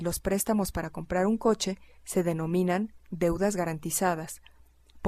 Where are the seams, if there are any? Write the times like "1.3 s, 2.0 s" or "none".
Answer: 1.3 s